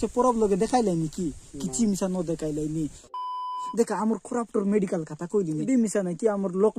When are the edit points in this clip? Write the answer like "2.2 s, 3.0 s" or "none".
3.2 s, 5.7 s